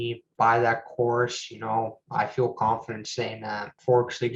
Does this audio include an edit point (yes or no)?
no